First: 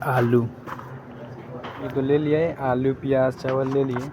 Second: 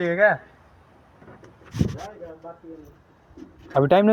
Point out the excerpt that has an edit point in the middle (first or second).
first